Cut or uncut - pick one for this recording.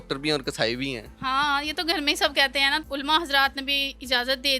cut